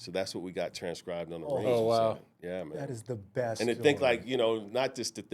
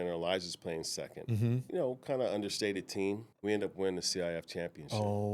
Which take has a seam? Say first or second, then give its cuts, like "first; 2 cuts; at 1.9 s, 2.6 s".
second; 2 cuts; at 1.7 s, 3.3 s